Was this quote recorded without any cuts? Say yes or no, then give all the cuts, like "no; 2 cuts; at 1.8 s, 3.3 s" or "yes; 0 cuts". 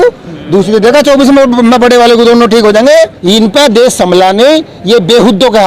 no; 1 cut; at 3.2 s